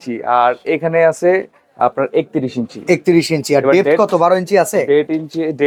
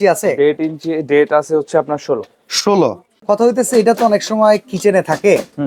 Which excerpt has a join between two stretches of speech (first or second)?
second